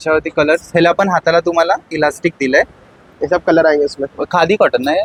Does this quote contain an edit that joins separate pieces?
no; 0 cuts

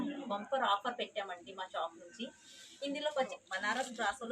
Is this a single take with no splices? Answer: no; 1 cut; at 3.4 s

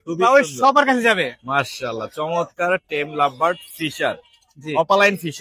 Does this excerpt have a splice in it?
no; 0 cuts

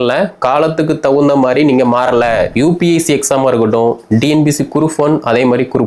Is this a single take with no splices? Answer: no; 1 cut; at 2.5 s

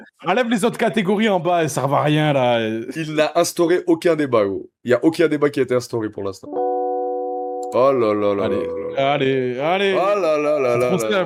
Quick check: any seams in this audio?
no; 0 cuts

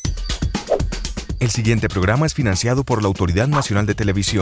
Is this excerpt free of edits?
no; 1 cut; at 1.3 s

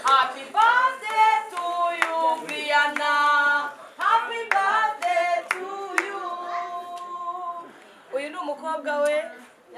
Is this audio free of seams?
yes; 0 cuts

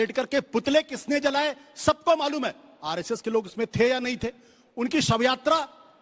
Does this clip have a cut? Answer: no; 0 cuts

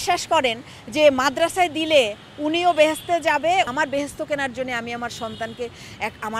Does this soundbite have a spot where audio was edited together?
yes; 1 cut; at 3.7 s

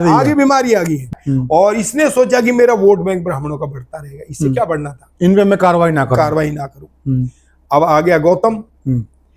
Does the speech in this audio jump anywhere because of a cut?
yes; 1 cut; at 1.2 s

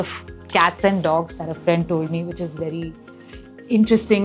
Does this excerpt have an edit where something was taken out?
no; 0 cuts

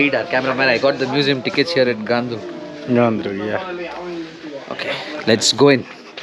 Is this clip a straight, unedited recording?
yes; 0 cuts

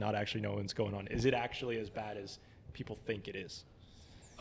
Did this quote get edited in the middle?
no; 0 cuts

